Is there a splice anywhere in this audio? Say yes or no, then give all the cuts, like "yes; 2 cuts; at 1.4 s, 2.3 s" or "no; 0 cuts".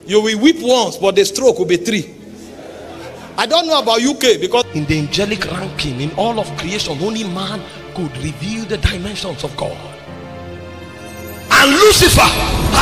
yes; 1 cut; at 4.7 s